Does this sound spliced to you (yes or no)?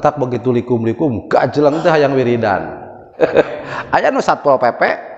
yes